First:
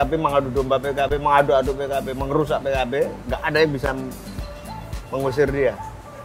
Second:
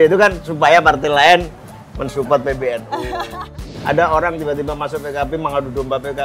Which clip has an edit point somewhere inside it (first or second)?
second